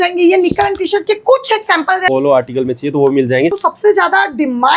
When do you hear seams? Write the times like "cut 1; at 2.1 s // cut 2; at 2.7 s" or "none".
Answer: cut 1; at 2.1 s // cut 2; at 3.6 s